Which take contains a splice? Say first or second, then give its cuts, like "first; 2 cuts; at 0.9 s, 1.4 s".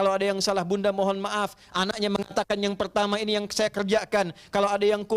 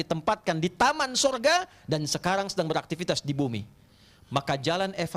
second; 1 cut; at 3.8 s